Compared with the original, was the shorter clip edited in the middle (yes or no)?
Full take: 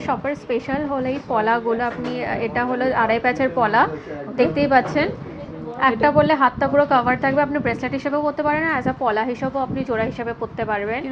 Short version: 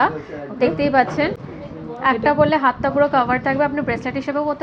no